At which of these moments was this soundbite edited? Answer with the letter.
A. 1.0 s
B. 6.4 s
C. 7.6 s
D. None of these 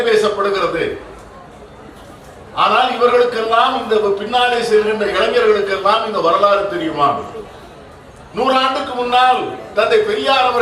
D